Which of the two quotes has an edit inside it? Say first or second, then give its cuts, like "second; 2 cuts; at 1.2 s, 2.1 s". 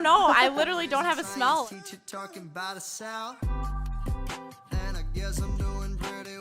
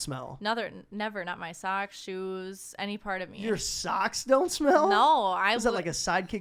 first; 1 cut; at 1.6 s